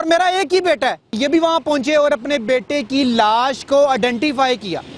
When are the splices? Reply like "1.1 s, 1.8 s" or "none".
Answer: 1.2 s